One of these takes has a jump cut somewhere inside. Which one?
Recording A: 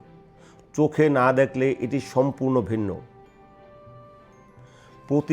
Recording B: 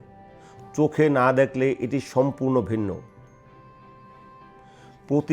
A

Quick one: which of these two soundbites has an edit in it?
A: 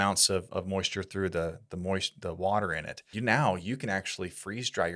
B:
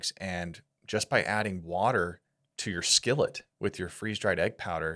A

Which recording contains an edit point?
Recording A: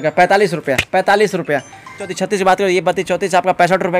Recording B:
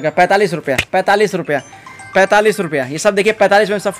A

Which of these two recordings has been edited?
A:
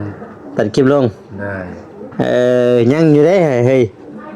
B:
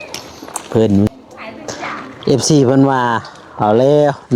B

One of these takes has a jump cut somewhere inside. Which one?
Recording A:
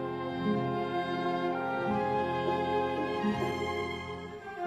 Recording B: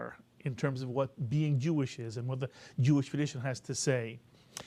B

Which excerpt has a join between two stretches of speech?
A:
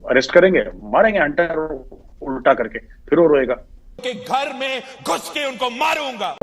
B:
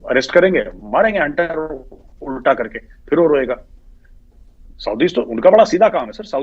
A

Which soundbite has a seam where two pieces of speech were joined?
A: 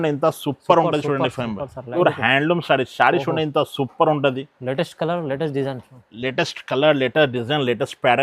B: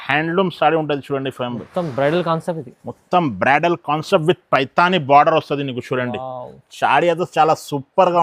A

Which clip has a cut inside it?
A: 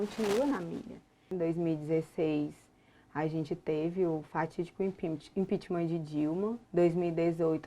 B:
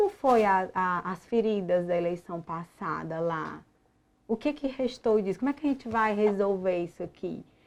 A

